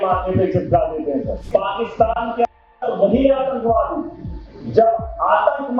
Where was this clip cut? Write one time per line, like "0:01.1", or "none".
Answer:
0:01.4